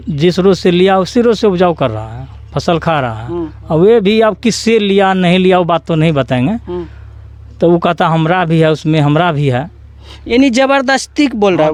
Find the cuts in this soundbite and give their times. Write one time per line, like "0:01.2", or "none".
none